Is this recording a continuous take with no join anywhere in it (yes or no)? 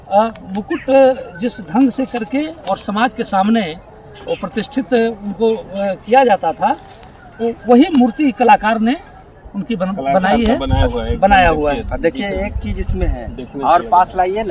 yes